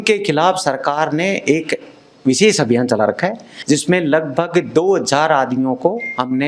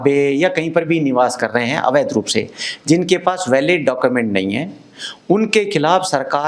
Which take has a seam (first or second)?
first